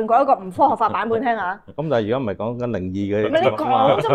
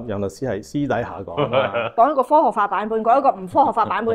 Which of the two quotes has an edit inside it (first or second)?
second